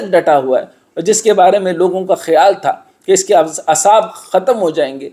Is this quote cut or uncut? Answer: uncut